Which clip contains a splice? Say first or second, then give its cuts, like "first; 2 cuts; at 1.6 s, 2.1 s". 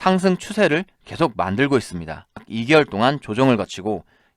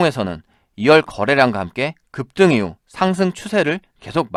first; 1 cut; at 2.5 s